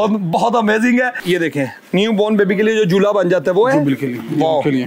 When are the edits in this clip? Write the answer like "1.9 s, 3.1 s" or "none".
1.2 s